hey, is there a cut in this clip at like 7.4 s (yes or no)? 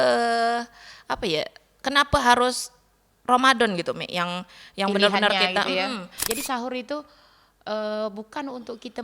no